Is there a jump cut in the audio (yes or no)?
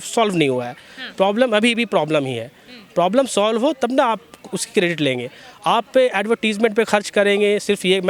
no